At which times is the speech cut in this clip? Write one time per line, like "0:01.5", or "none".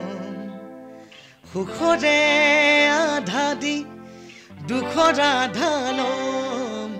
none